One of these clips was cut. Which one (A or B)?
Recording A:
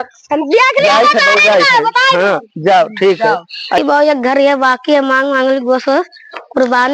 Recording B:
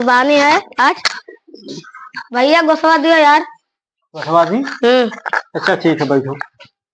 A